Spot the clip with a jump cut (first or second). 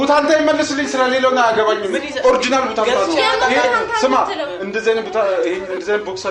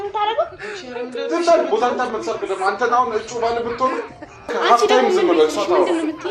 second